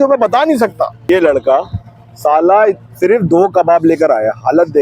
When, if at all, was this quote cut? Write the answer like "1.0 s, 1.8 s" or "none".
1.1 s